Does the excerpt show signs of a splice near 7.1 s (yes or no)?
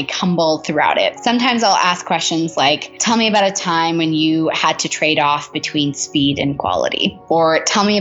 yes